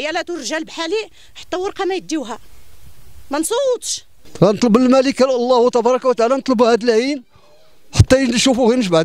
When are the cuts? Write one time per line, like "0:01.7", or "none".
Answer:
0:04.2